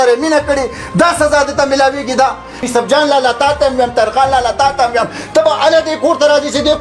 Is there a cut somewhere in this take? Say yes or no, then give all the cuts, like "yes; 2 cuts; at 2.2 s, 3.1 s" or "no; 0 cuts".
yes; 1 cut; at 2.6 s